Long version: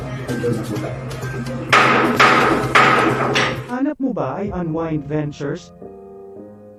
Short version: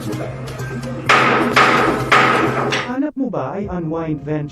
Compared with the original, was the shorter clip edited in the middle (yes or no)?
yes